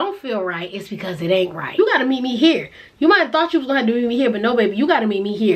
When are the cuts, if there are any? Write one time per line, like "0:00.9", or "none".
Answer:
0:01.7